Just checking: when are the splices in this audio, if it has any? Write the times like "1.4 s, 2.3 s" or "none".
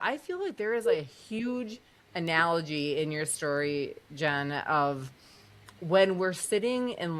none